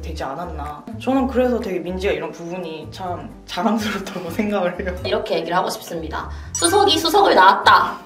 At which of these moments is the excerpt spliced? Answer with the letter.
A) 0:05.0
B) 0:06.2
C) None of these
A